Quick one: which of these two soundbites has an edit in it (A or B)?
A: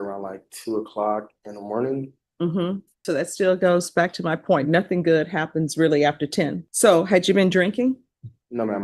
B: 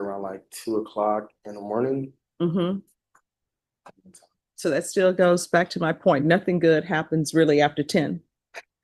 A